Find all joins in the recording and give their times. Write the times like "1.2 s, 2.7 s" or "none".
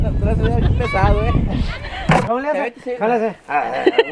2.2 s